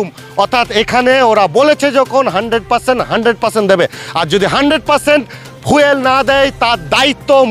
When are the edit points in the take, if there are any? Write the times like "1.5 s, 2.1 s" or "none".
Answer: none